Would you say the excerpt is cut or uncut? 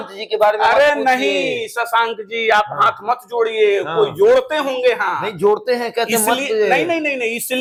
uncut